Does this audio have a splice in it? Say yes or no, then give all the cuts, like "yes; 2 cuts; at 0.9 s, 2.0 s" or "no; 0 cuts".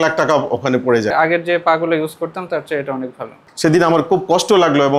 yes; 2 cuts; at 1.1 s, 3.4 s